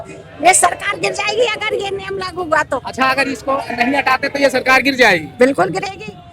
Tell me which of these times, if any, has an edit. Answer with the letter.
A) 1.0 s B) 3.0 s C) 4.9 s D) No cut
D